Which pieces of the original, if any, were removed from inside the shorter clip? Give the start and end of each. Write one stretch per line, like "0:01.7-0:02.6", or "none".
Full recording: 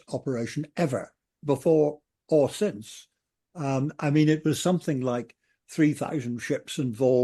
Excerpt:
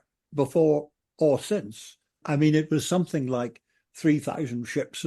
0:03.3-0:03.9